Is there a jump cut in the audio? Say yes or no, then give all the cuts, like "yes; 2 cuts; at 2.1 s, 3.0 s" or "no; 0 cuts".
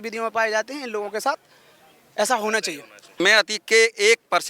yes; 1 cut; at 3.1 s